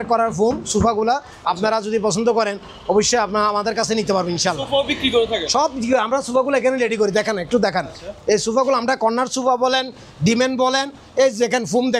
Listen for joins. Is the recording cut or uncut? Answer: uncut